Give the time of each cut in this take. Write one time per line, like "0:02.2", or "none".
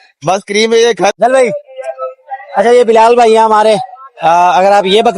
0:01.1